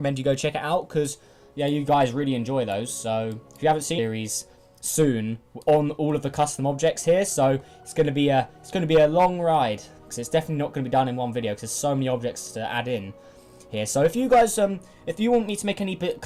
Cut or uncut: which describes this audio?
uncut